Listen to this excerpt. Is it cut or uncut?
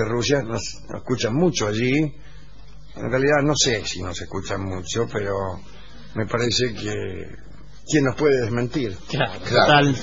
cut